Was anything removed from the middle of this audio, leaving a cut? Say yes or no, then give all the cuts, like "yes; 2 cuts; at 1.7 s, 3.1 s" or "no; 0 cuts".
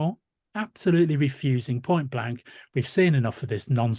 no; 0 cuts